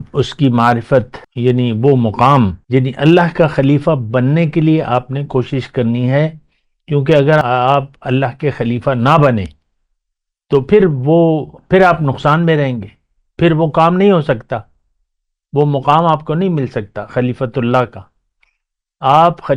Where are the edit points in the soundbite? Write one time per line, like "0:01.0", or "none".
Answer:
0:01.2
0:02.6
0:07.4